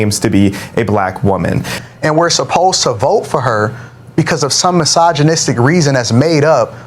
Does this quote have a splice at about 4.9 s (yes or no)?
no